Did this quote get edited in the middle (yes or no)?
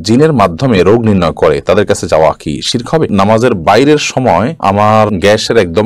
yes